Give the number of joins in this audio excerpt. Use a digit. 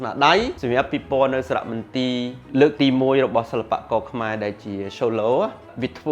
1